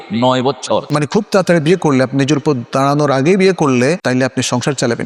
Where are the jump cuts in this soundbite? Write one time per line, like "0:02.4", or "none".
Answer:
0:00.9
0:04.0